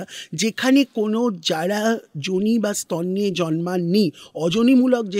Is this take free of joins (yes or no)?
yes